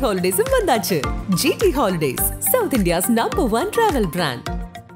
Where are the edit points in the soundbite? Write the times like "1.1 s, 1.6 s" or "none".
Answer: none